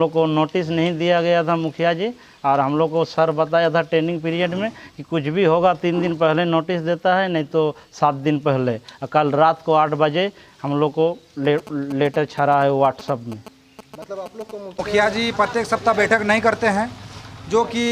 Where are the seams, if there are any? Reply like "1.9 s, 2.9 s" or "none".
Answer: 14.8 s

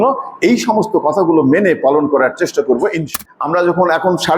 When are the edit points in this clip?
3.0 s

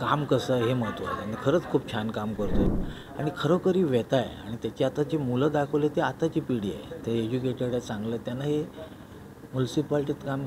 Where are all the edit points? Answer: 2.7 s

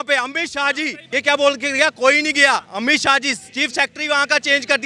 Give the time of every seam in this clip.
1.0 s

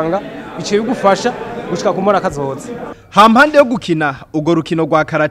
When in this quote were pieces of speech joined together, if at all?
none

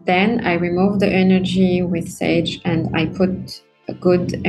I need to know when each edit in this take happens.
none

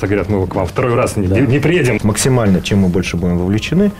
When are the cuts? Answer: 2.0 s

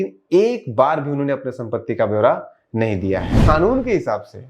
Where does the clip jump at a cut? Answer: 3.4 s

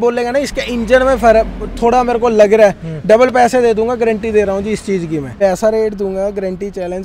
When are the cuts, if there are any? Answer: 5.4 s

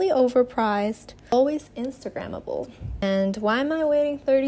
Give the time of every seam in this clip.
1.3 s, 3.0 s

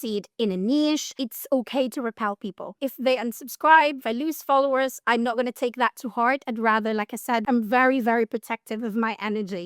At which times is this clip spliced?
1.2 s, 2.7 s, 4.0 s, 5.0 s, 7.4 s

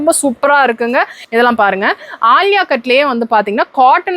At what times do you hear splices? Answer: 1.2 s

